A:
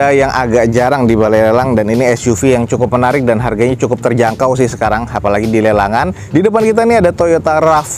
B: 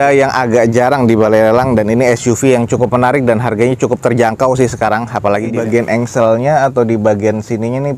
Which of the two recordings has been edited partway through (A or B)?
B